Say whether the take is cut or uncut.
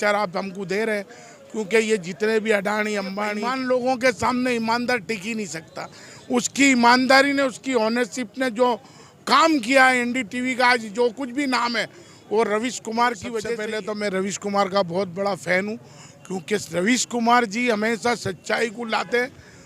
cut